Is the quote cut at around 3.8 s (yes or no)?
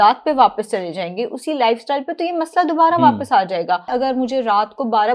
yes